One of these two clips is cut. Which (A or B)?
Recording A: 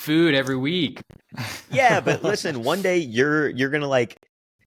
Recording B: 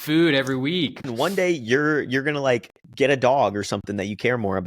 B